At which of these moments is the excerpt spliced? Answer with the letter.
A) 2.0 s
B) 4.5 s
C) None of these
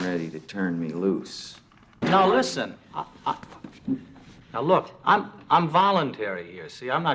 A